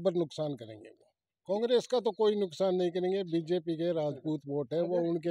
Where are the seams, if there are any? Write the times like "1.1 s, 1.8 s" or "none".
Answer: none